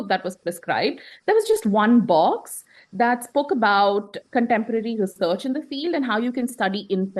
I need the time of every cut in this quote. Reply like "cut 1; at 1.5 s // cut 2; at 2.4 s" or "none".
none